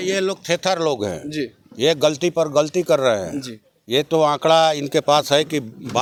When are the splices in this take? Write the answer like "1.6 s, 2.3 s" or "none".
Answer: none